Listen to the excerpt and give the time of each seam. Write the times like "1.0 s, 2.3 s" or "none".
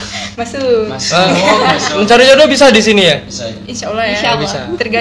none